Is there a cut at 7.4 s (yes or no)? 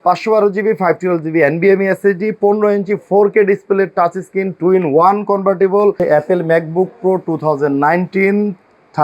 no